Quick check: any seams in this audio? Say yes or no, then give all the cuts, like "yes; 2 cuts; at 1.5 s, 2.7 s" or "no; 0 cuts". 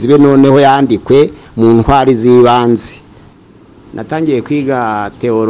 yes; 1 cut; at 3.3 s